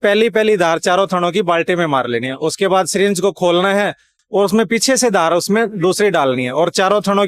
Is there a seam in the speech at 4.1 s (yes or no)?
yes